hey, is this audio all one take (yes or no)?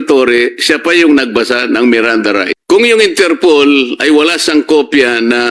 no